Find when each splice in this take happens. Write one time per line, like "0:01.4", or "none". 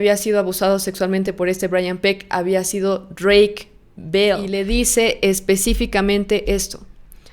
0:04.5